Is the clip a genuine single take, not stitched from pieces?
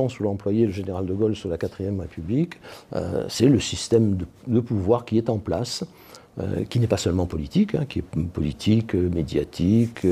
yes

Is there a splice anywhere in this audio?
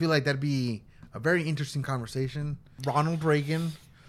yes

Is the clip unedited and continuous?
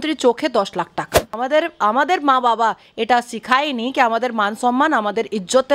no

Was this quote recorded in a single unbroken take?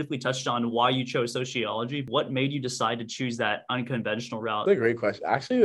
no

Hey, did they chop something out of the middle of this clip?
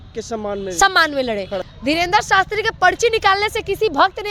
yes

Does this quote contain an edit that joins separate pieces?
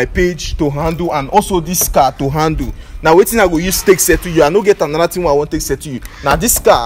no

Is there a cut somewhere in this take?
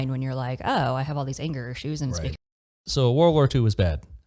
yes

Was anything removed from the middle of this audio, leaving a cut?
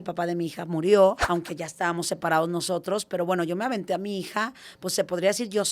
yes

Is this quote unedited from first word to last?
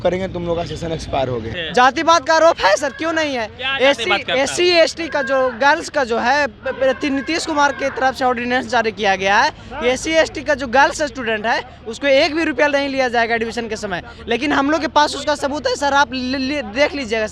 no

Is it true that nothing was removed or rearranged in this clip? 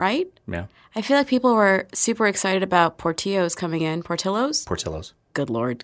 yes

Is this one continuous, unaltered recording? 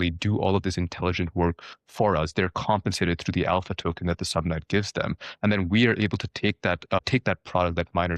no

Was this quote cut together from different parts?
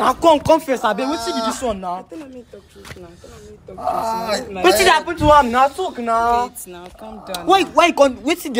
no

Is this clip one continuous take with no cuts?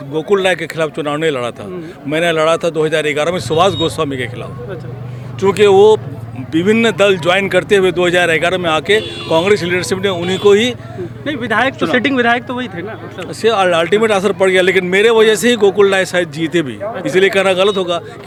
yes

